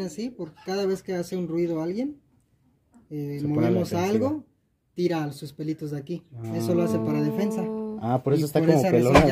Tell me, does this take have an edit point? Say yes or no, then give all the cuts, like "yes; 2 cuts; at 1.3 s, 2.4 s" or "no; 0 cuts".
no; 0 cuts